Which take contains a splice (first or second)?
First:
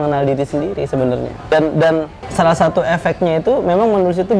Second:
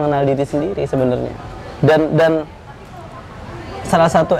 first